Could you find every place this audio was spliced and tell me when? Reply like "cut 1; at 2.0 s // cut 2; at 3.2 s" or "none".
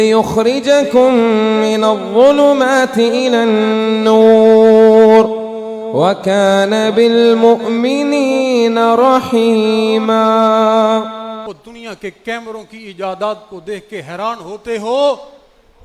cut 1; at 11.4 s

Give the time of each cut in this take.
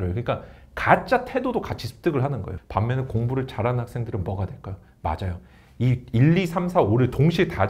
cut 1; at 2.5 s

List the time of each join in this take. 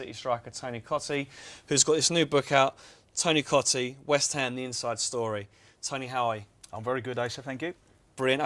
none

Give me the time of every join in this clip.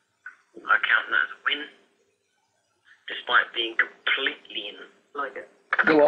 none

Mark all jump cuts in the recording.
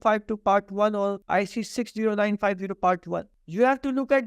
cut 1; at 1.2 s // cut 2; at 3.4 s

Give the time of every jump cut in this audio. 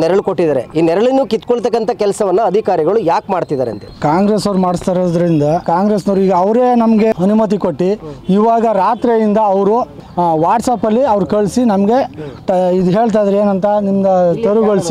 cut 1; at 3.8 s // cut 2; at 5.6 s // cut 3; at 7.1 s // cut 4; at 10.0 s

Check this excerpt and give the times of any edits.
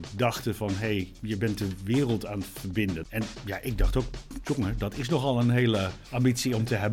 cut 1; at 3.0 s // cut 2; at 6.0 s

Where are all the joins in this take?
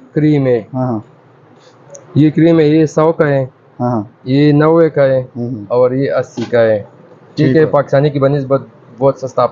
none

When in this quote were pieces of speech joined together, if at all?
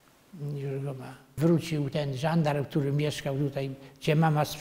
cut 1; at 1.3 s

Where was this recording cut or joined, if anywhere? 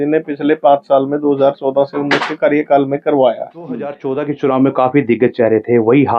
cut 1; at 4.0 s

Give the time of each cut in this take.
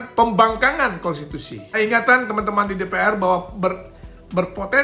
cut 1; at 1.6 s

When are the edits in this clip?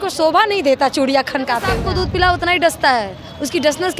cut 1; at 1.8 s

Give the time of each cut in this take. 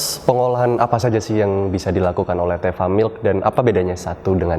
none

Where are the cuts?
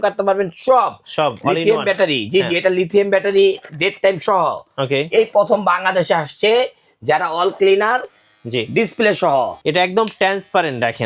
cut 1; at 9.6 s

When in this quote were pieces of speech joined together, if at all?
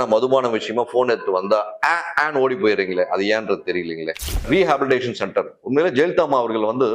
cut 1; at 4.5 s

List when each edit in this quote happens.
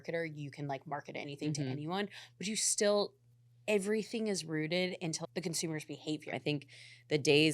cut 1; at 5.2 s // cut 2; at 6.3 s

